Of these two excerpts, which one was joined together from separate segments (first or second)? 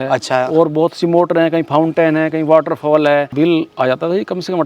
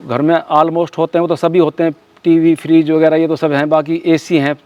first